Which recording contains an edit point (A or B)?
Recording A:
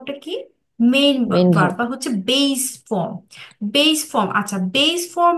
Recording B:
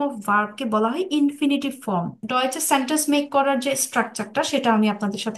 B